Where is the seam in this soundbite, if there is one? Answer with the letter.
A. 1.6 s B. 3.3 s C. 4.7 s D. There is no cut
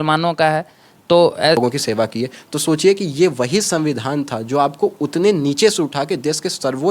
A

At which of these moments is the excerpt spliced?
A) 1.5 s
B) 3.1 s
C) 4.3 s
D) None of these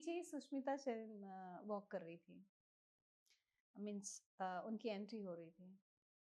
D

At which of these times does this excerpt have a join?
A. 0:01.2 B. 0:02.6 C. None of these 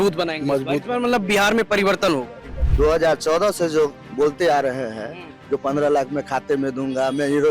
B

